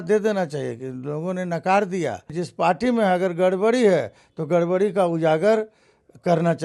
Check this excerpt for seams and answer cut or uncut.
cut